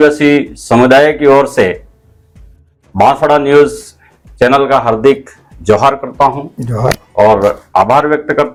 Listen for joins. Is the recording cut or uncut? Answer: uncut